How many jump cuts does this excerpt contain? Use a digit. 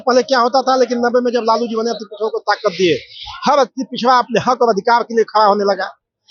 0